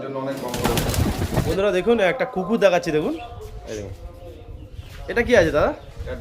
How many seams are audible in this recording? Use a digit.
1